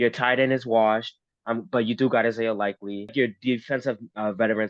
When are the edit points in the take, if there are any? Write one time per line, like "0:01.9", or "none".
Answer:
0:03.1

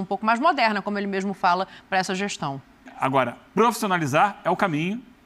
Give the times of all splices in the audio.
0:02.9

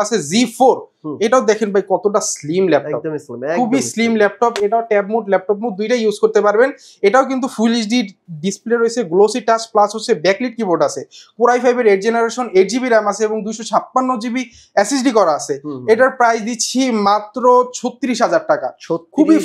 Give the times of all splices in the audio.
none

